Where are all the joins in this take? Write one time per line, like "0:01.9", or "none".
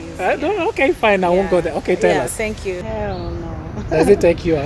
0:02.8